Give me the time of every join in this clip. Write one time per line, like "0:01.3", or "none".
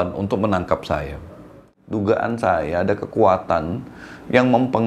0:01.8